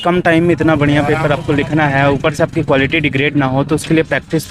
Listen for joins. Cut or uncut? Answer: uncut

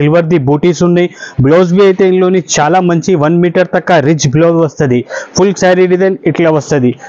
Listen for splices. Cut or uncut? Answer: uncut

